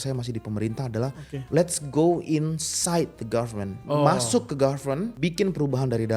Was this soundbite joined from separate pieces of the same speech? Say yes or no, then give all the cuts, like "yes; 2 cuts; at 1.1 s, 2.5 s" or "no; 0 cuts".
yes; 2 cuts; at 3.8 s, 5.1 s